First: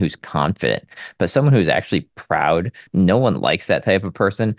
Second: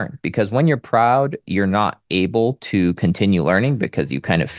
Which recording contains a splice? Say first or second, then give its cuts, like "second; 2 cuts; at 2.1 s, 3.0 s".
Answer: first; 1 cut; at 2.9 s